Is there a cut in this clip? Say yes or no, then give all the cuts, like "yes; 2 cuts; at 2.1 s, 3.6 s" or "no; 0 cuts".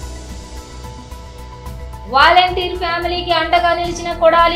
yes; 1 cut; at 1.8 s